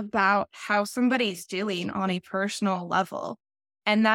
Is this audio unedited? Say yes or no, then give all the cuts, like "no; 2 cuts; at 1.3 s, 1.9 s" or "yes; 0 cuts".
yes; 0 cuts